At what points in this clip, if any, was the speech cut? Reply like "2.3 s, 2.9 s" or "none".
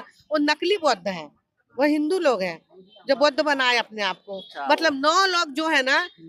none